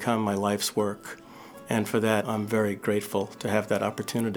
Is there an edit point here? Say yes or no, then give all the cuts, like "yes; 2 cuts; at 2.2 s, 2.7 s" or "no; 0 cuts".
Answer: yes; 1 cut; at 2.2 s